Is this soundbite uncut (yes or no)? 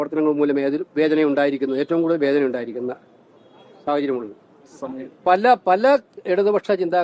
yes